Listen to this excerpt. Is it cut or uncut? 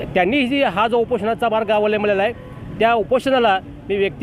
uncut